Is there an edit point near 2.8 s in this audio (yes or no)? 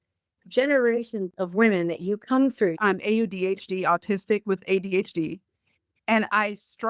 yes